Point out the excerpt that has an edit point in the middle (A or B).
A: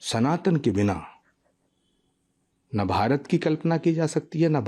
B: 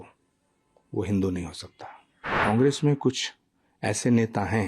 B